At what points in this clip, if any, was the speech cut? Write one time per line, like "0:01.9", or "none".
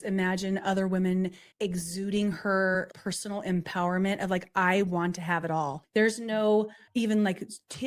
0:01.4
0:02.9
0:05.8
0:06.8